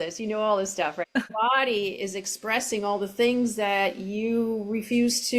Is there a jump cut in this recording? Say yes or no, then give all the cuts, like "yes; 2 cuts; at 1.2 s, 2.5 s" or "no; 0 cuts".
yes; 1 cut; at 1.2 s